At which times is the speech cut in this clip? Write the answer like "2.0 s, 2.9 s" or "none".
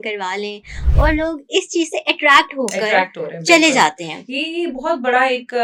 none